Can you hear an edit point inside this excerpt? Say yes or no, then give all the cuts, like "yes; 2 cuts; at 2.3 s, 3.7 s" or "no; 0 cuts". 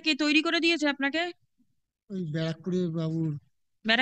no; 0 cuts